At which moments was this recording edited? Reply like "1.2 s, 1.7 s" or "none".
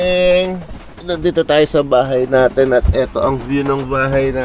1.0 s